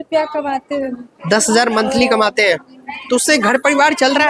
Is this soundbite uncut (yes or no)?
yes